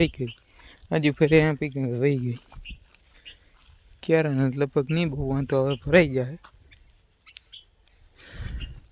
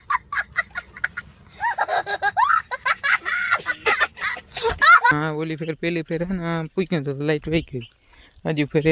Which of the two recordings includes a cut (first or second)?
second